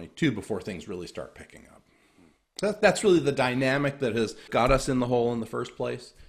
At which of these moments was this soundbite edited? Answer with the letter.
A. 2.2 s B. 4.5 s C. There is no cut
B